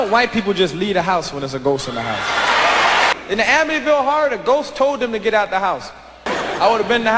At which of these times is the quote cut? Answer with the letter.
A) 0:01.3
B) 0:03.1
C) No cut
B